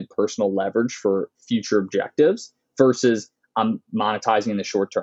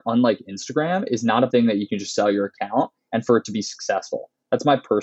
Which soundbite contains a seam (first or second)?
second